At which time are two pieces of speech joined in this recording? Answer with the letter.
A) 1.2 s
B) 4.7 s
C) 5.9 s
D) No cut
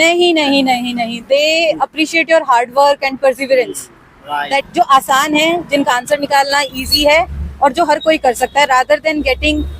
B